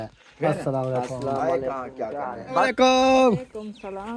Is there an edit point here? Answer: yes; 1 cut; at 2.6 s

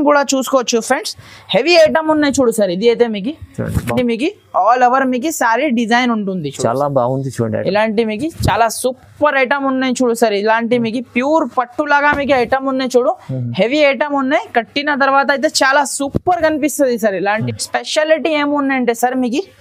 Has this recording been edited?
yes; 2 cuts; at 3.9 s, 17.4 s

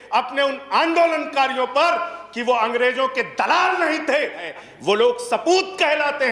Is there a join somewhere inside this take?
yes; 1 cut; at 4.5 s

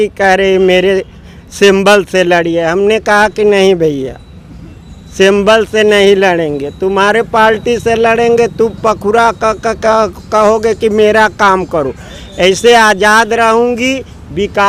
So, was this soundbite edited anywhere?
no; 0 cuts

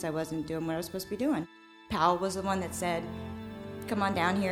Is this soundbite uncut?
no; 1 cut; at 1.6 s

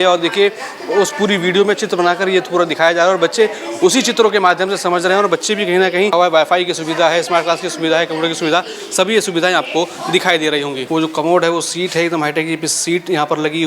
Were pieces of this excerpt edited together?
yes; 2 cuts; at 6.1 s, 10.8 s

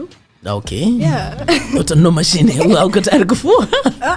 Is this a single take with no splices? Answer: yes; 0 cuts

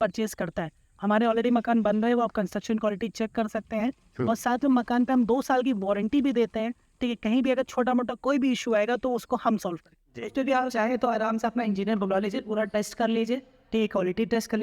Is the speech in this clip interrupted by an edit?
yes; 1 cut; at 10.0 s

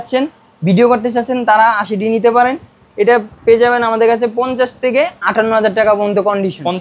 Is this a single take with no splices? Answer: yes; 0 cuts

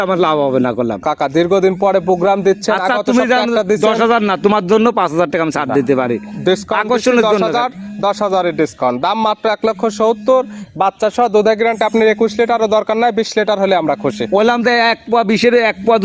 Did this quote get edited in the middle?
no; 0 cuts

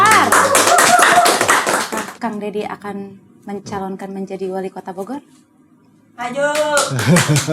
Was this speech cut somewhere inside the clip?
yes; 1 cut; at 1.9 s

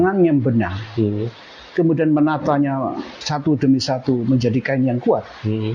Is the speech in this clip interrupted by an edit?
no; 0 cuts

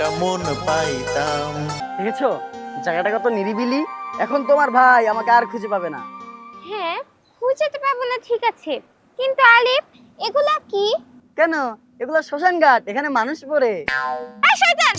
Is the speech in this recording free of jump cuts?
no; 1 cut; at 1.8 s

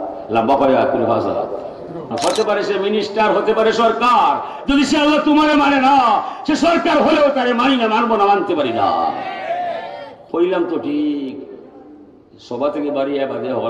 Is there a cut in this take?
yes; 1 cut; at 2.1 s

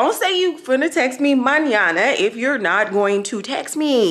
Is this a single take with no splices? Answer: yes; 0 cuts

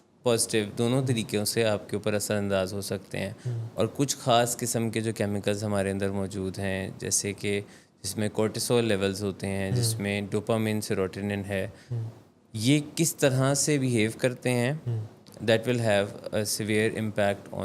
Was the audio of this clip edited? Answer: no; 0 cuts

